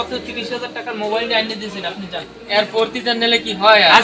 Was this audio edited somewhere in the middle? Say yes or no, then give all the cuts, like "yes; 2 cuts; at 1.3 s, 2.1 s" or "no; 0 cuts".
no; 0 cuts